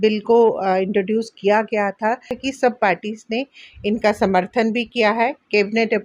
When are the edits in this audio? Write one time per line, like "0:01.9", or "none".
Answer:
0:02.4